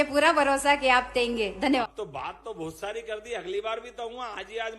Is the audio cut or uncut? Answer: cut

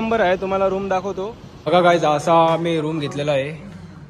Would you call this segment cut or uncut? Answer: cut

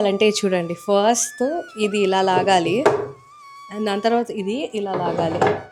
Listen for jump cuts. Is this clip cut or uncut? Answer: uncut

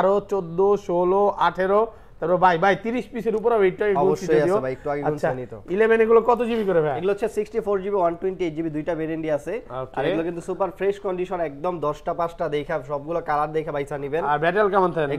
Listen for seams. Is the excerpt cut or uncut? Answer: uncut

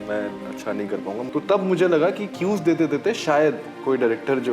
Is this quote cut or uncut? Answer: cut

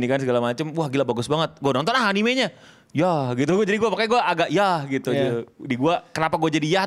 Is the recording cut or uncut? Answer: uncut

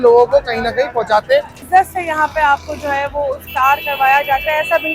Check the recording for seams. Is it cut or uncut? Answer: cut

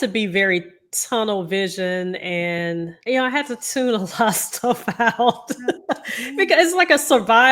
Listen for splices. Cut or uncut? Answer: cut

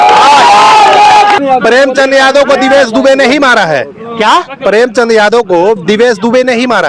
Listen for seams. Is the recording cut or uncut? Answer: cut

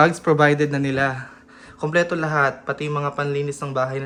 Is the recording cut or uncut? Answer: uncut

